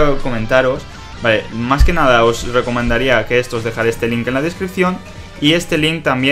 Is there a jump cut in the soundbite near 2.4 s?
no; 1 cut; at 4.2 s

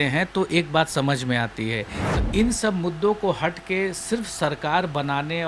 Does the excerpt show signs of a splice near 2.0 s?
yes; 1 cut; at 2.0 s

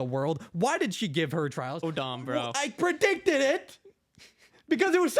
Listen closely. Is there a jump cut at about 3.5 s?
no; 1 cut; at 1.8 s

